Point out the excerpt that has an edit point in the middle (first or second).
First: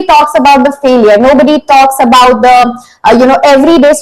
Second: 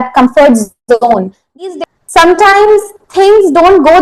second